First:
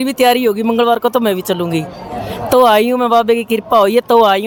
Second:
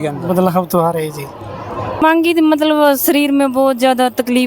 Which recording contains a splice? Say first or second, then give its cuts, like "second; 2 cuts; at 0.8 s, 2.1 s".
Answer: second; 1 cut; at 2.0 s